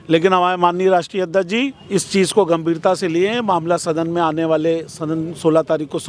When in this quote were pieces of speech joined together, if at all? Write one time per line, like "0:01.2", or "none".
0:01.8